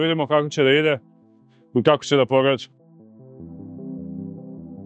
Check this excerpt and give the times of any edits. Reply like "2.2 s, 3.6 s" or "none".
none